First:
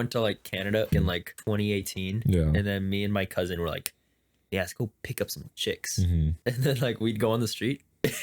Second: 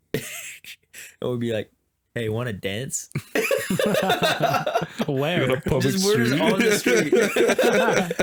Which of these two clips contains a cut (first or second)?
first